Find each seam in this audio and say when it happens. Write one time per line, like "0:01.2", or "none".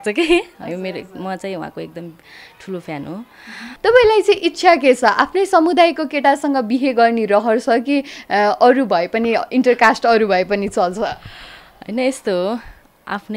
0:03.7

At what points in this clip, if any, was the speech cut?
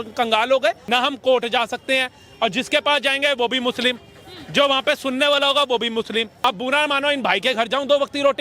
0:00.8
0:06.3

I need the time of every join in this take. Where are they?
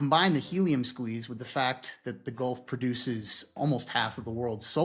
0:03.5

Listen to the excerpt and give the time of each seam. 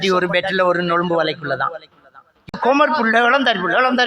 0:02.6

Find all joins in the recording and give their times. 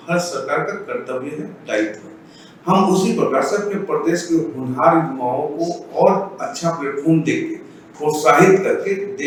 none

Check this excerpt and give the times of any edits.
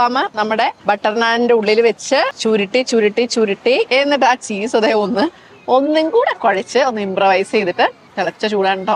none

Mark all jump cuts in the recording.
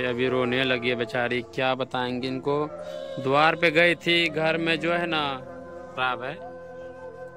0:05.9

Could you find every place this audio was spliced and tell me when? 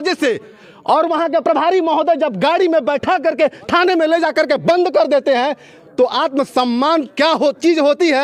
none

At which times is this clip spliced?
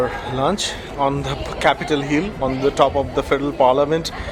none

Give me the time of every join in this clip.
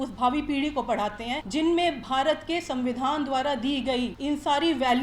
0:01.4
0:04.2

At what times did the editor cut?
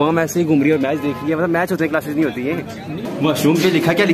0:03.1

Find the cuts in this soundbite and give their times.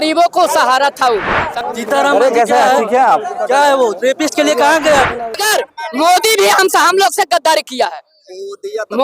0:01.5
0:05.4

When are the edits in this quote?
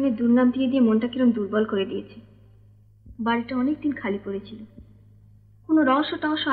none

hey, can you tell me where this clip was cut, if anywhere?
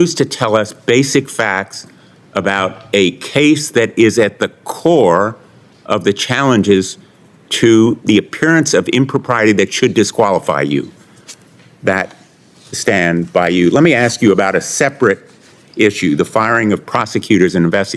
0:11.1

